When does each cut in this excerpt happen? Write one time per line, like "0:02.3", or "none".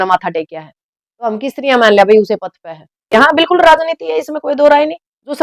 0:03.1